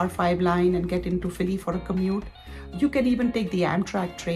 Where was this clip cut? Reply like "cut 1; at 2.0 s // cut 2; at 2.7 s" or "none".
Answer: none

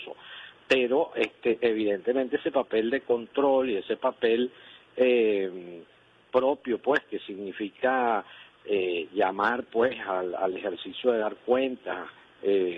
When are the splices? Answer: cut 1; at 1.7 s

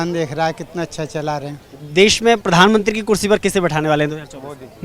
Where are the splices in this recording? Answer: cut 1; at 2.2 s

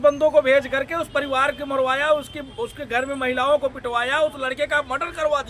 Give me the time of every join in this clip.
none

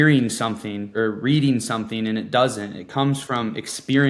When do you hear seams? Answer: cut 1; at 0.9 s

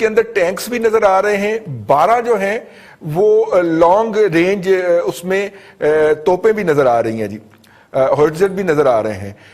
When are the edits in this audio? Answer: none

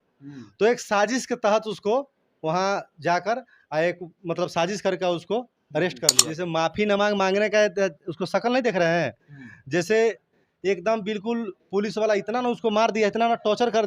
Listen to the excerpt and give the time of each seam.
cut 1; at 6.1 s

